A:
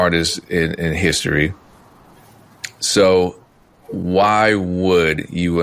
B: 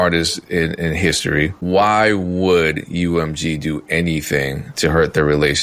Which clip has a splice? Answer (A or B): B